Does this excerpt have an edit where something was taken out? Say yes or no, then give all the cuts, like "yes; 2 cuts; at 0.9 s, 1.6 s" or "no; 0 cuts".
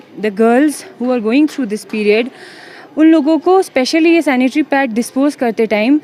no; 0 cuts